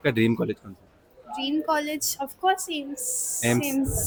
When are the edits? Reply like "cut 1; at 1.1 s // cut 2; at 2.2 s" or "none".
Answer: none